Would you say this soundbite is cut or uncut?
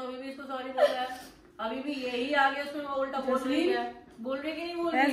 uncut